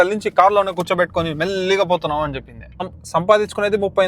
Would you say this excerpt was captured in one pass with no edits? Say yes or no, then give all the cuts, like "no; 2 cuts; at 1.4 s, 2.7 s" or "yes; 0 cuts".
no; 1 cut; at 2.9 s